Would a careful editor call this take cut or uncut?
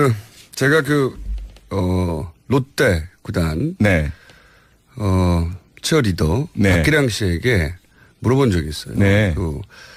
uncut